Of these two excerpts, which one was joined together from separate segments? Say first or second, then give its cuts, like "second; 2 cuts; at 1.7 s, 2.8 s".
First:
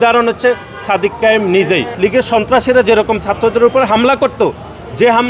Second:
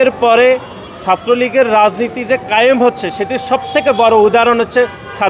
first; 1 cut; at 1.9 s